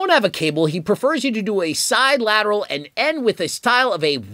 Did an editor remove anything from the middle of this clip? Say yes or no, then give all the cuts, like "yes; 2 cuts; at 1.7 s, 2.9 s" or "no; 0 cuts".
no; 0 cuts